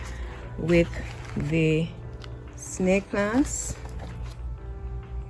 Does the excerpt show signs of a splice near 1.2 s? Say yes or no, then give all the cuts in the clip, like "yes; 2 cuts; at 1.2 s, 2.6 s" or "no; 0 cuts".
no; 0 cuts